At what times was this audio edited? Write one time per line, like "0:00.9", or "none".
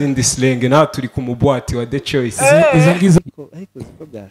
0:03.2